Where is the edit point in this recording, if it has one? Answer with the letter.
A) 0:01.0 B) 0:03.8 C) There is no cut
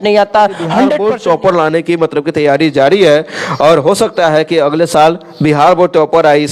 A